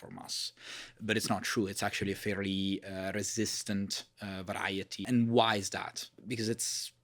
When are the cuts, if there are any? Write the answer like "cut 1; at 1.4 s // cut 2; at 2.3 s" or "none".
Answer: cut 1; at 5.0 s // cut 2; at 6.1 s